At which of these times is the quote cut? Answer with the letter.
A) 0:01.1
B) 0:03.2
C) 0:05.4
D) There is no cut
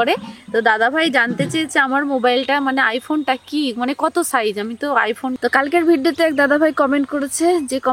C